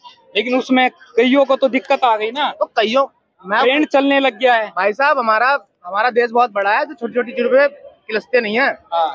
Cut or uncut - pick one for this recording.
uncut